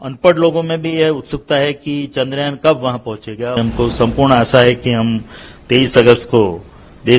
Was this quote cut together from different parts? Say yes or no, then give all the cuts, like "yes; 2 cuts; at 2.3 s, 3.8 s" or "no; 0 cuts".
yes; 1 cut; at 3.6 s